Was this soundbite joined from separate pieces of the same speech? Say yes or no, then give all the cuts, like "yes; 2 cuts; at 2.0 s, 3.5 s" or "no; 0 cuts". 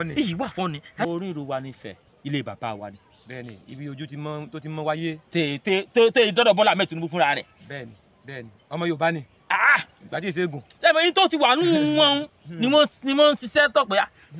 yes; 1 cut; at 1.1 s